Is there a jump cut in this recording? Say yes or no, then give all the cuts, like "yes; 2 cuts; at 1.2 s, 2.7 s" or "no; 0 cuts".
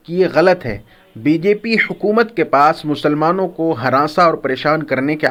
no; 0 cuts